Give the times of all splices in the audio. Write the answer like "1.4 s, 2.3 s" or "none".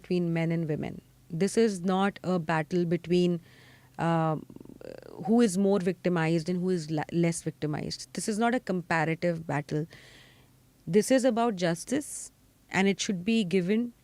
none